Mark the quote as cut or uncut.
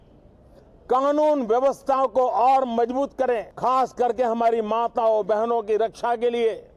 cut